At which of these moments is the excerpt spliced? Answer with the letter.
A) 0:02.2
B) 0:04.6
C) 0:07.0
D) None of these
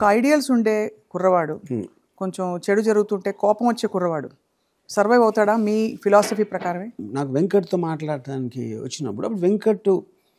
C